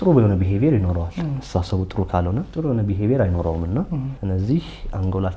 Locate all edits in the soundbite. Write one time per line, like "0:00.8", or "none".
0:02.5
0:04.1